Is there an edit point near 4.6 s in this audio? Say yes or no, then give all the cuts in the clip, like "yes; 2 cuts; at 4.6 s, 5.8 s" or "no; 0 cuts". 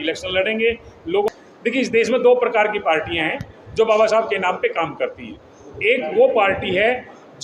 no; 1 cut; at 1.3 s